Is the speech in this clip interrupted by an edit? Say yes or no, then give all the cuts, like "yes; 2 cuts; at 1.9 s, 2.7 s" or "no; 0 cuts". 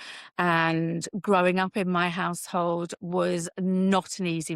no; 0 cuts